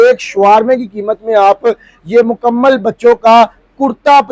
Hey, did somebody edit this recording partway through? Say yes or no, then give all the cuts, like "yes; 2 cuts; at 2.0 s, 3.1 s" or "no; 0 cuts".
no; 0 cuts